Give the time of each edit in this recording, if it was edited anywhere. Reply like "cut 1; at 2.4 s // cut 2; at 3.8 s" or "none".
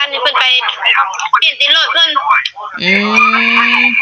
none